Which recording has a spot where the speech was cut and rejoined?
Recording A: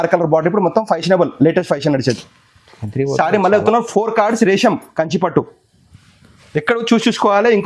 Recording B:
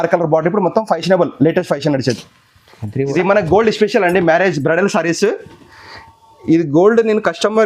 B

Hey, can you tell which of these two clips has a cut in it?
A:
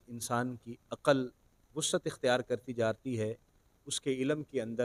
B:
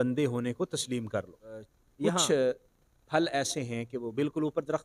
B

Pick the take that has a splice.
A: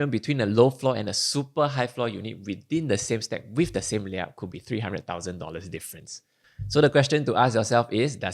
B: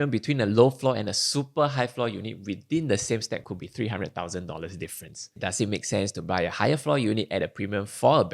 B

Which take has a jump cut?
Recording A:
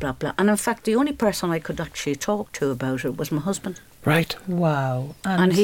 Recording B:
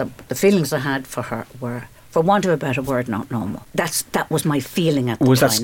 B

